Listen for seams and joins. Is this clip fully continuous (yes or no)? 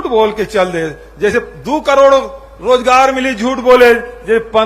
yes